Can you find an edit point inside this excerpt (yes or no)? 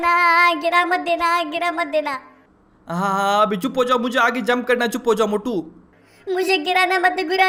no